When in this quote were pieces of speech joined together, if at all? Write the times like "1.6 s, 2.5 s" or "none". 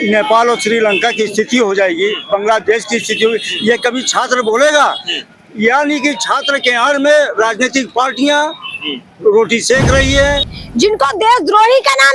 10.6 s